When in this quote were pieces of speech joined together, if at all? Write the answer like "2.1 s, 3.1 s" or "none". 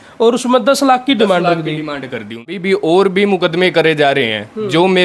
2.5 s